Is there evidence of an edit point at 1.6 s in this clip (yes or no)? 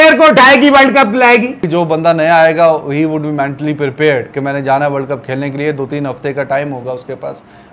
yes